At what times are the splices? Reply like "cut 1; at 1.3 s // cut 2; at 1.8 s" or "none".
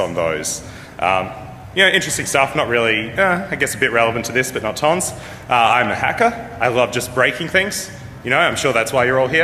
cut 1; at 7.2 s